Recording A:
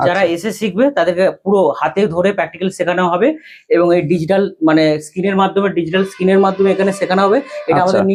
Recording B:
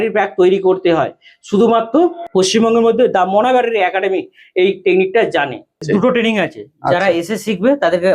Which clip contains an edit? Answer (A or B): B